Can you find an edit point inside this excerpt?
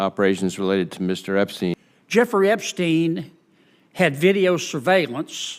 yes; 1 cut; at 1.7 s

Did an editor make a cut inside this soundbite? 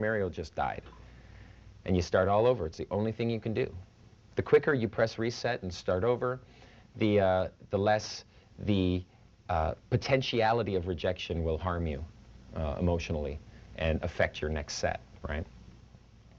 yes; 1 cut; at 12.9 s

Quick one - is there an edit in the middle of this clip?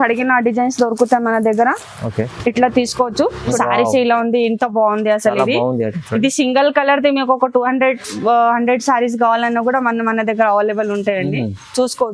yes; 1 cut; at 3.5 s

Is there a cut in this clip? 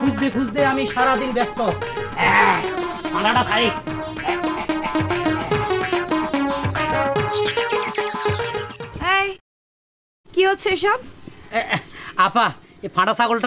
no; 0 cuts

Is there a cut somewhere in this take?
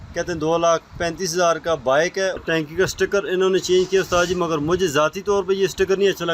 yes; 1 cut; at 2.4 s

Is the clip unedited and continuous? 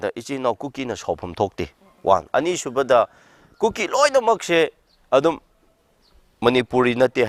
yes; 0 cuts

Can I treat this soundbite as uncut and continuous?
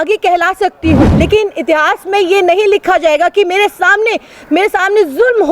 no; 1 cut; at 1.1 s

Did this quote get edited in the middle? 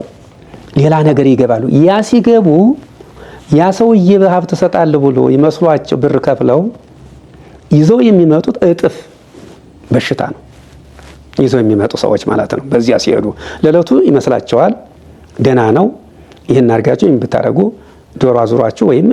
no; 0 cuts

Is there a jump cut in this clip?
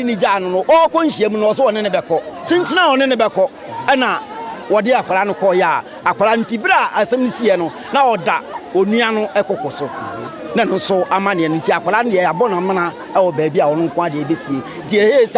no; 0 cuts

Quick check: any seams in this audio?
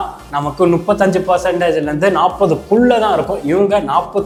no; 0 cuts

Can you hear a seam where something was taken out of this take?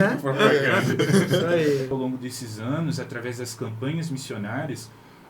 yes; 1 cut; at 1.9 s

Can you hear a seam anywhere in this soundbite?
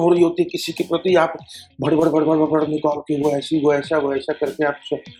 no; 0 cuts

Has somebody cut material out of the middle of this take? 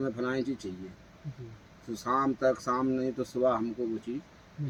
no; 0 cuts

